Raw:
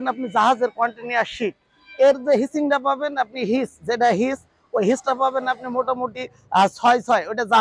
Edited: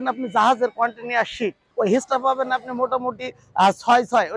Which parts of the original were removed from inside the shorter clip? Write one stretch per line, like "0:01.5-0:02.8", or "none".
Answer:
0:01.6-0:04.6